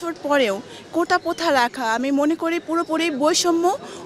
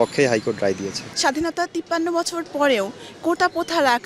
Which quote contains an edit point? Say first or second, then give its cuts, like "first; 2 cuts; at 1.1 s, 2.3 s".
second; 1 cut; at 1.0 s